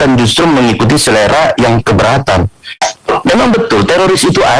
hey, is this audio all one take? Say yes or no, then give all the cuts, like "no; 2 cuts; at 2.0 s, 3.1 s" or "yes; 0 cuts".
no; 1 cut; at 2.9 s